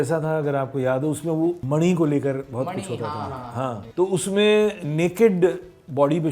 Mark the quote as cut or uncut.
cut